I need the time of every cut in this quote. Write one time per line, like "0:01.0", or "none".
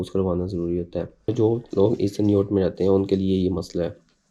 0:01.3